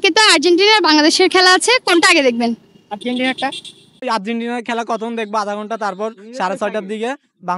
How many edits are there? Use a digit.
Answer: 1